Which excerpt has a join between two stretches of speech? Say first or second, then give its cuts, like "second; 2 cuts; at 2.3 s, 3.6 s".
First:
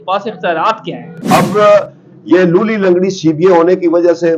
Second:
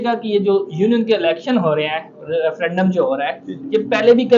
first; 1 cut; at 1.2 s